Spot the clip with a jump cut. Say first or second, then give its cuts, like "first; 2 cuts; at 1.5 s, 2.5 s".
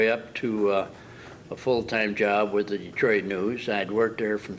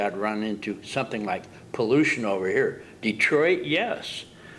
first; 1 cut; at 1.8 s